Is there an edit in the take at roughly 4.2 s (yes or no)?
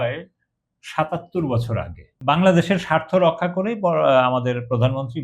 no